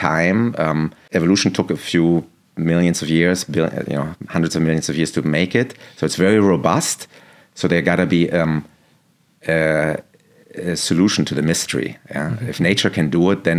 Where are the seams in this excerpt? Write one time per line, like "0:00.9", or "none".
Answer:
0:01.0